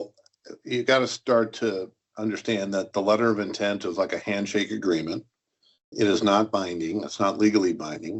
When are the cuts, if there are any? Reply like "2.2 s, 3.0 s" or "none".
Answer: none